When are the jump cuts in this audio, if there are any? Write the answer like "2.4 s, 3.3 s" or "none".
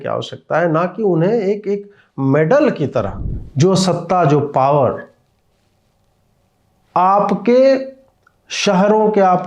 3.2 s